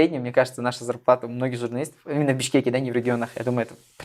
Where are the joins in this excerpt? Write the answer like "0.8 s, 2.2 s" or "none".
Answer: none